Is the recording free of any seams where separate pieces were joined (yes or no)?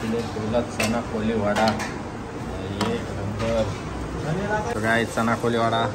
no